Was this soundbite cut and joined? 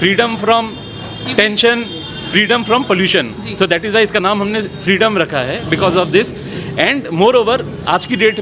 no; 0 cuts

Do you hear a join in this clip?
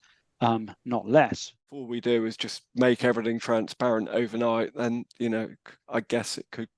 yes; 1 cut; at 1.9 s

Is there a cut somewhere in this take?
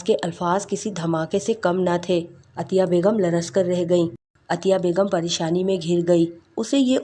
yes; 1 cut; at 4.3 s

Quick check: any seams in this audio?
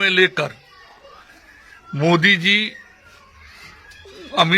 no; 0 cuts

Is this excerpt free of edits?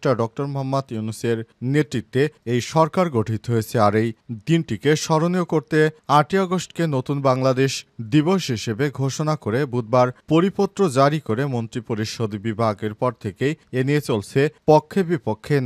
yes; 0 cuts

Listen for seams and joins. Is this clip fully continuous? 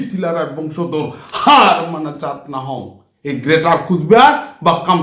yes; 0 cuts

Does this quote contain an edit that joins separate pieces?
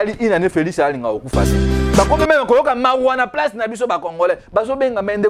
yes; 1 cut; at 1.8 s

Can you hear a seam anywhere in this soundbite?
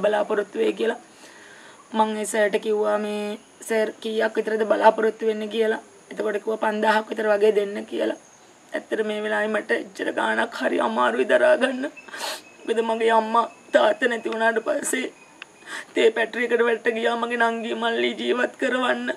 no; 0 cuts

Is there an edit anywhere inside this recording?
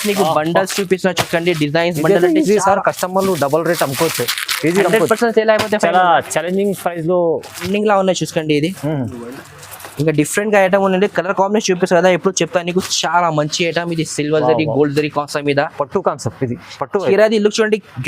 yes; 1 cut; at 7.7 s

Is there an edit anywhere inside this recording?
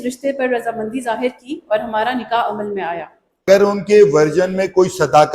yes; 1 cut; at 3.5 s

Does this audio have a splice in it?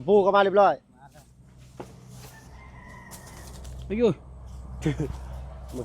yes; 1 cut; at 0.9 s

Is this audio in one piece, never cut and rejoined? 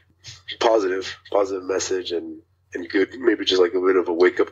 yes; 0 cuts

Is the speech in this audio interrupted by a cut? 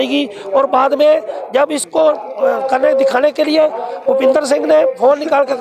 no; 0 cuts

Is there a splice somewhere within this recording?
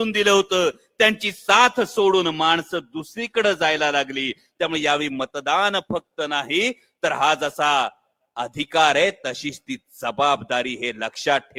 no; 0 cuts

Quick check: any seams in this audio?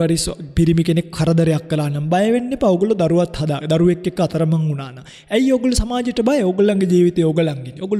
no; 0 cuts

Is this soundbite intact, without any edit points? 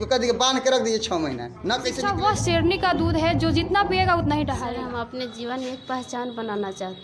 no; 2 cuts; at 2.0 s, 4.6 s

